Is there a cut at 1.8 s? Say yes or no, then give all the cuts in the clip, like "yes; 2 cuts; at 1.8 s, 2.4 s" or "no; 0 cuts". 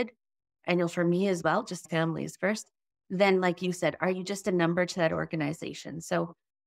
yes; 1 cut; at 1.8 s